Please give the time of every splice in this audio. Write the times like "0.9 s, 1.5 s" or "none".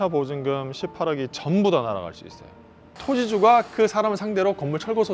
2.9 s